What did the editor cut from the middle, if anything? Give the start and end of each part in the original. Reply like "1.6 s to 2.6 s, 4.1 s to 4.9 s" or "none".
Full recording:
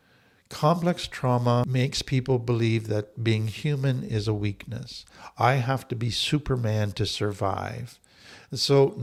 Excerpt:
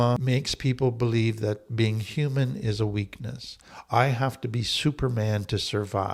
none

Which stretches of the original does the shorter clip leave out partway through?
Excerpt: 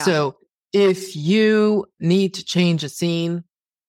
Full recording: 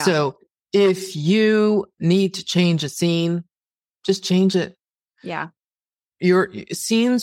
none

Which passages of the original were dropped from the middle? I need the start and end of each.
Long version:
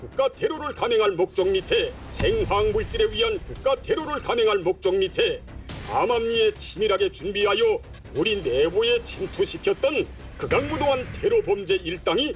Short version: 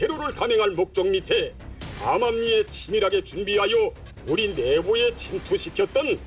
2.0 s to 5.5 s

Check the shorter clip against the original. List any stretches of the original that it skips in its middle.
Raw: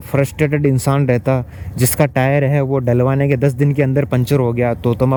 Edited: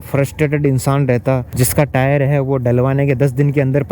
1.5 s to 1.7 s

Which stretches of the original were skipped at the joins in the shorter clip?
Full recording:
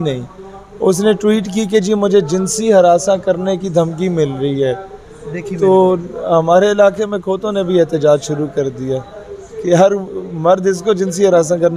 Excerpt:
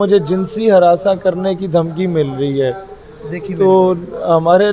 none

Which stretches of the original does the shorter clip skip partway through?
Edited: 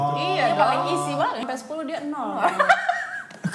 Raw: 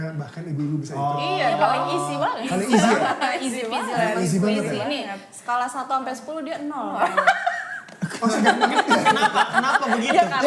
2.5 s to 6.0 s

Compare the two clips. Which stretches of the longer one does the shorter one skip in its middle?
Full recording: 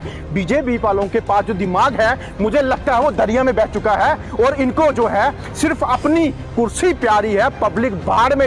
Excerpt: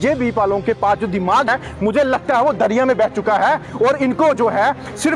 2.0 s to 2.1 s

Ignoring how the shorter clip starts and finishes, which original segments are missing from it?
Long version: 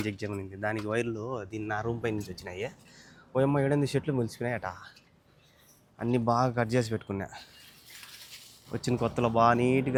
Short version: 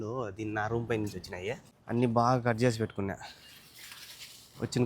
2.9 s to 5.8 s

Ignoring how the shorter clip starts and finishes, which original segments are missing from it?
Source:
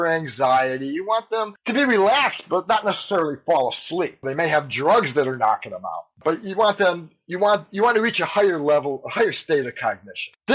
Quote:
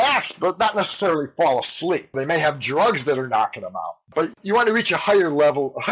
6.5 s to 7.7 s

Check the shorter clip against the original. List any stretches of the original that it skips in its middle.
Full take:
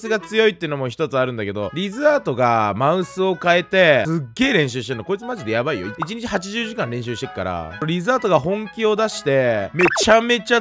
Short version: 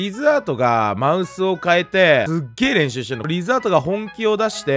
4.9 s to 7.7 s

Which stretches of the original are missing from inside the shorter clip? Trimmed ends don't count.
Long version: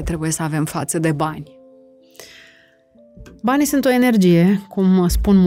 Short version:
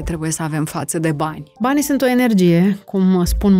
1.4 s to 3.3 s

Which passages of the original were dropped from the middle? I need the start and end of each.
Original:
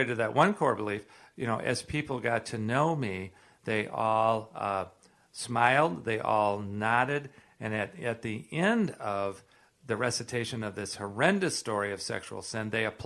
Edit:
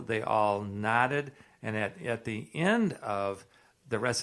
none

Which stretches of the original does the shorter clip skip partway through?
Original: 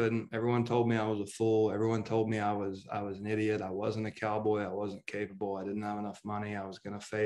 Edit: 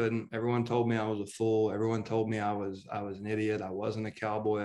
none

